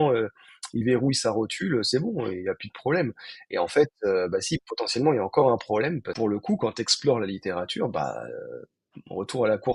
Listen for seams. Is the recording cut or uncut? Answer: cut